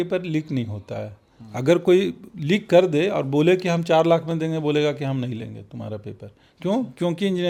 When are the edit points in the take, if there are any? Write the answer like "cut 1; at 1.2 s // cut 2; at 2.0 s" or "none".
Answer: none